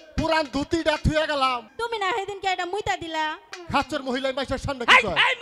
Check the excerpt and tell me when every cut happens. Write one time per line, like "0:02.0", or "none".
0:01.7
0:03.4